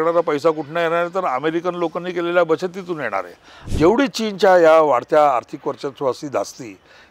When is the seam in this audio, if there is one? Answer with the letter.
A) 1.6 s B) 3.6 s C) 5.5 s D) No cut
B